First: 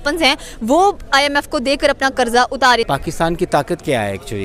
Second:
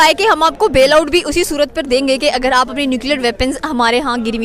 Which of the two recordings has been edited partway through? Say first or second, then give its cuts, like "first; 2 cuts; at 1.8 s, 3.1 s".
first; 1 cut; at 2.9 s